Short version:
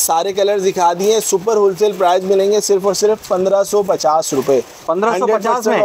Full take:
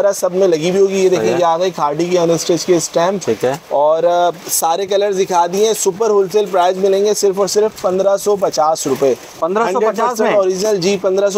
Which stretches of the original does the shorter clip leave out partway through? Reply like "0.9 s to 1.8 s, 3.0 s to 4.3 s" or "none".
none